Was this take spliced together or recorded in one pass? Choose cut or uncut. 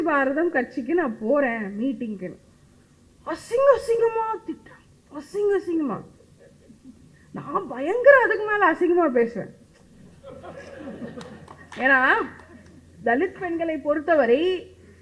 uncut